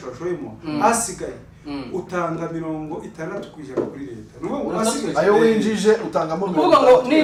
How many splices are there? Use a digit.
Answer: 0